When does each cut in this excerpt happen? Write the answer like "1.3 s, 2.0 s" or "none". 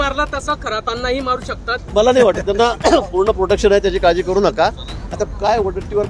1.8 s

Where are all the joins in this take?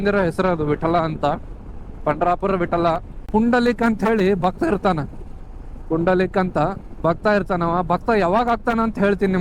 3.2 s

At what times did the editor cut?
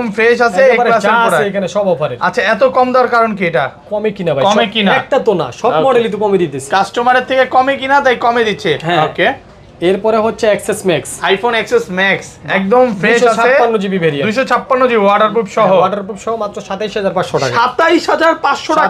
none

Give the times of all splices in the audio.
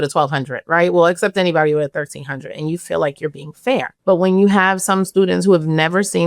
3.9 s

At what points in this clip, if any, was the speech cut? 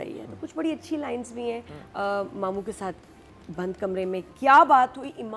1.7 s

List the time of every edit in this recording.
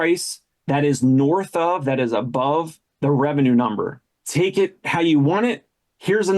4.2 s

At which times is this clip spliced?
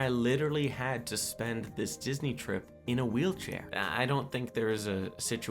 2.7 s, 3.6 s

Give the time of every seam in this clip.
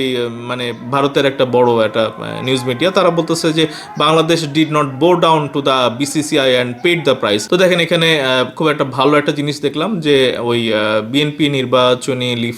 7.4 s

